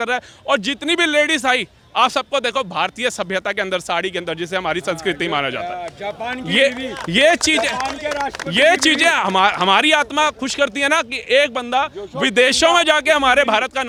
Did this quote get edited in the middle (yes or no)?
no